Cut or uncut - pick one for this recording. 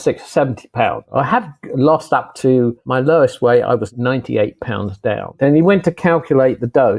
cut